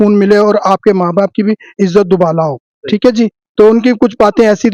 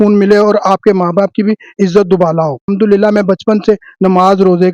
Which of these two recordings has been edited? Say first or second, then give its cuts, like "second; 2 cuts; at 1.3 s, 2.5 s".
second; 1 cut; at 2.7 s